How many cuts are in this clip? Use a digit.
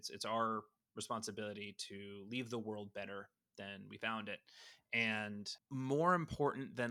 1